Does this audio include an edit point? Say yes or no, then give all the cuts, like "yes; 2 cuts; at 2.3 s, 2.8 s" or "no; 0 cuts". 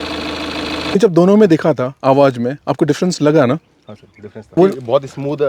yes; 2 cuts; at 1.0 s, 4.5 s